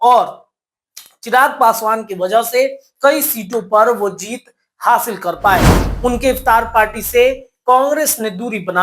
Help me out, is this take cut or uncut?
cut